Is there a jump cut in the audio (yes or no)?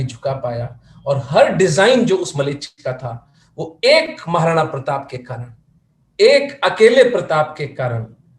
no